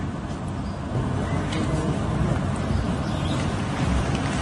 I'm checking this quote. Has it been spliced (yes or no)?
yes